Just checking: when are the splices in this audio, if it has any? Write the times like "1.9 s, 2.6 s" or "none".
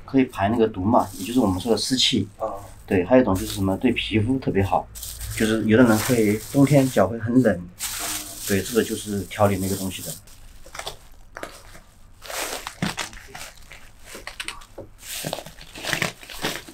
10.3 s, 15.1 s

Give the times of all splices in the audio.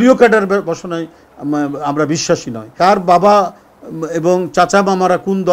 2.7 s

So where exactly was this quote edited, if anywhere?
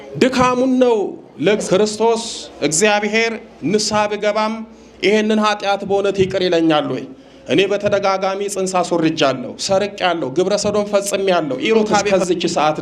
1.6 s, 12.1 s

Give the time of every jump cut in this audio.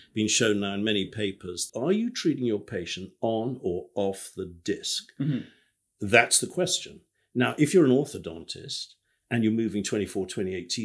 1.6 s

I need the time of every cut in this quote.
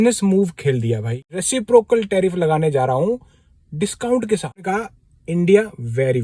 1.3 s, 4.6 s

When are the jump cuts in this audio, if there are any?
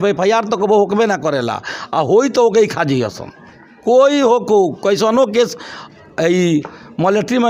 none

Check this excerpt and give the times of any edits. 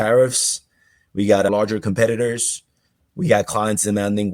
1.5 s

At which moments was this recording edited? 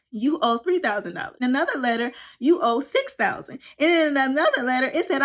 1.4 s

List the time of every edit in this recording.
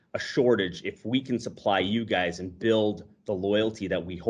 none

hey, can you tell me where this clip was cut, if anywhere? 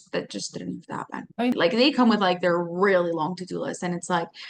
1.6 s

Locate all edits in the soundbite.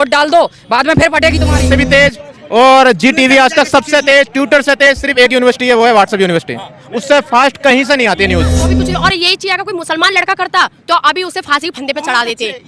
1.7 s, 8.7 s

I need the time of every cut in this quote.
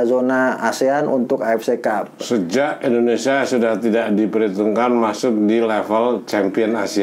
none

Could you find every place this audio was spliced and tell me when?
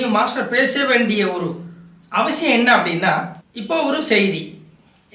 none

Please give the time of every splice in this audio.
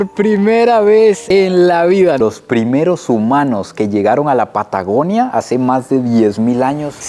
2.2 s

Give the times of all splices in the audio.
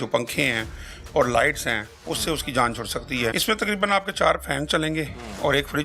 3.4 s

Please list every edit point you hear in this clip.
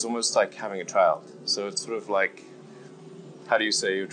none

